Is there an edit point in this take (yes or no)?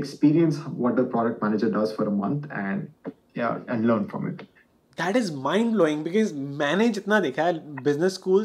no